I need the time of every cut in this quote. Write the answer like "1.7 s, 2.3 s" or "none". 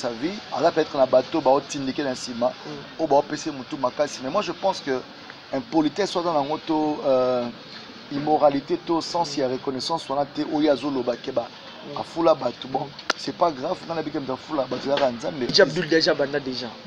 15.5 s